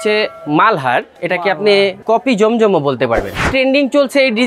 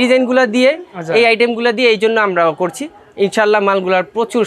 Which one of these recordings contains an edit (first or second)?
first